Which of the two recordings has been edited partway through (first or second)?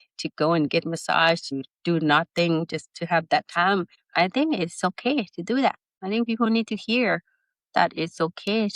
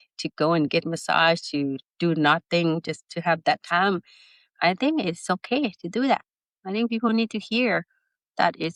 first